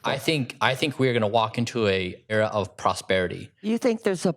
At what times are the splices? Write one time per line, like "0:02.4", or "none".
0:02.3
0:03.5